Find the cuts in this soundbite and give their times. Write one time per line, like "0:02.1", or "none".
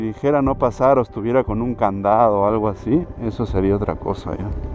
none